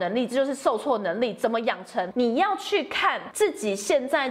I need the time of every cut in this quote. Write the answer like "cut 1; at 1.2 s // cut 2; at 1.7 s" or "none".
cut 1; at 2.1 s // cut 2; at 3.2 s